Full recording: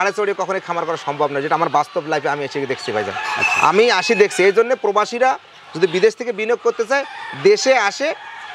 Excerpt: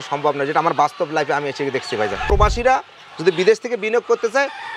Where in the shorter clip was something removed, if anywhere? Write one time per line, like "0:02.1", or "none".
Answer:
0:02.3